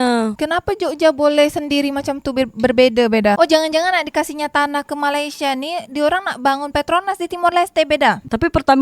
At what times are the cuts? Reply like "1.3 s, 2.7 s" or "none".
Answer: 3.3 s